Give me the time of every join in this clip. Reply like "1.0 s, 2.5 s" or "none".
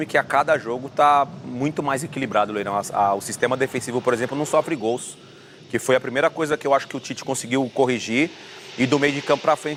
none

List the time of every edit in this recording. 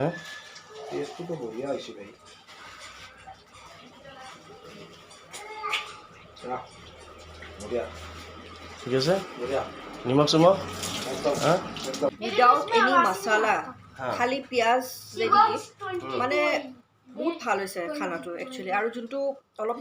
12.2 s

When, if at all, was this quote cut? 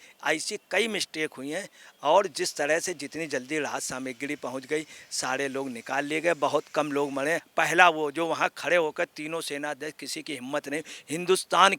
7.5 s

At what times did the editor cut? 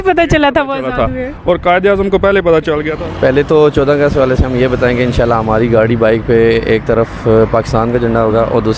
2.9 s

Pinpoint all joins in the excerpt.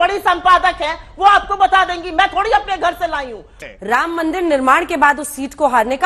3.5 s

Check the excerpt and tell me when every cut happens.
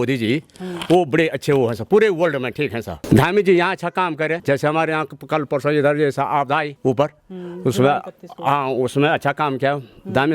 2.9 s, 4.4 s, 6.7 s

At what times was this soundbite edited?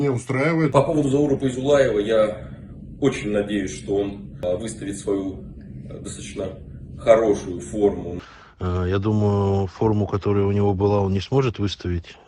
0.7 s, 4.4 s, 8.1 s

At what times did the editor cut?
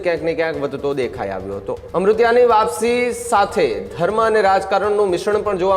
1.8 s

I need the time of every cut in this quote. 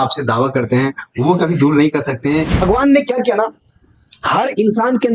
2.6 s

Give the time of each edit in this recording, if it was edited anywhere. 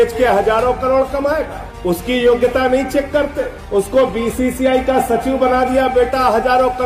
none

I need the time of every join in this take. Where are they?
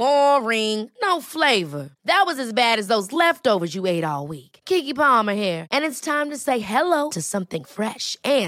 none

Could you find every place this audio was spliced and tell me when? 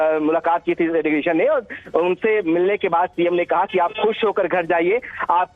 none

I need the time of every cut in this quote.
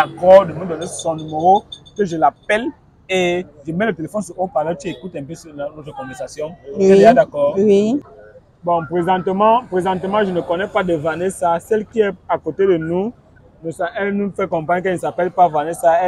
8.1 s

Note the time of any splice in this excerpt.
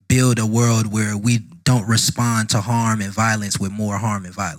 none

